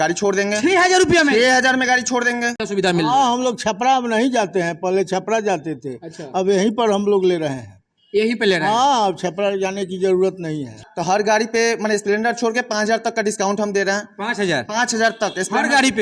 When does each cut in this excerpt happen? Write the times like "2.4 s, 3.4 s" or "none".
2.6 s, 10.8 s